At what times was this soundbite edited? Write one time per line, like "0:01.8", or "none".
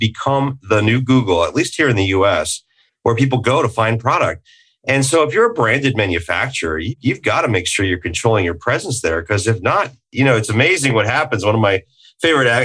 0:06.9